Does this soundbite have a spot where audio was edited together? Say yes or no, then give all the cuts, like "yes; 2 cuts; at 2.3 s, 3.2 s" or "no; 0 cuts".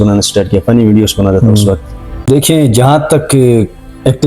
yes; 1 cut; at 2.3 s